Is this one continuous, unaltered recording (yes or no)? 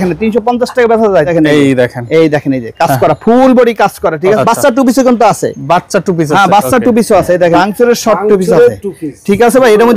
no